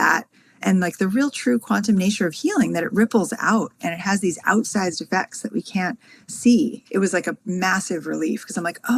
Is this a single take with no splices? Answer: no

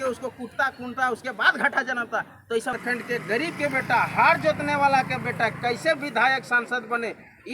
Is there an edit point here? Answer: yes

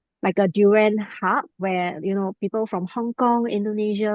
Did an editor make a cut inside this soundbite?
no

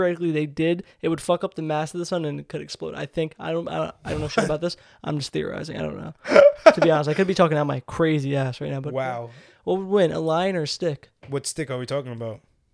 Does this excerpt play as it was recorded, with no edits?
no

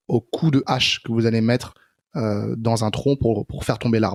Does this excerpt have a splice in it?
no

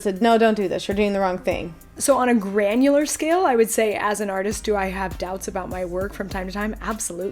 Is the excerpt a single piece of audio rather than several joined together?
no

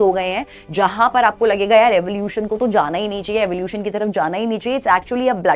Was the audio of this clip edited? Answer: no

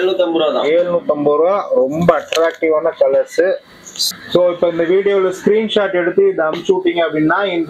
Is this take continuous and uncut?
no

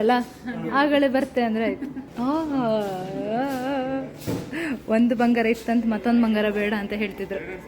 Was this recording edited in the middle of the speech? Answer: yes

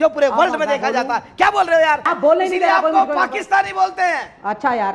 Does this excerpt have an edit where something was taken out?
yes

